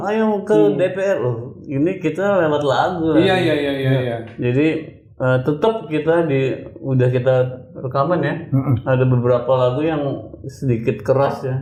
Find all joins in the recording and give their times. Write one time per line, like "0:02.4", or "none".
none